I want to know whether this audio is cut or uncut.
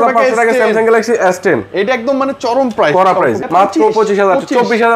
cut